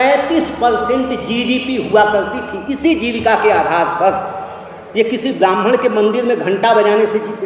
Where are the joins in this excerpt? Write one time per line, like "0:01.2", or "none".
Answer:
none